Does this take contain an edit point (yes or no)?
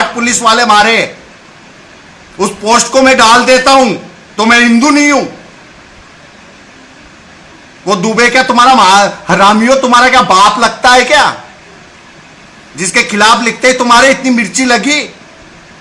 no